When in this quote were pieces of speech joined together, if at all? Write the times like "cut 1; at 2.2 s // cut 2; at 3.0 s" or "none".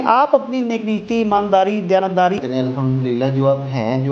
cut 1; at 2.4 s